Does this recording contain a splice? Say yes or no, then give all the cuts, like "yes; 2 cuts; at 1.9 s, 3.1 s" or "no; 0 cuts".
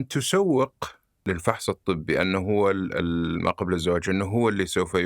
yes; 1 cut; at 1.2 s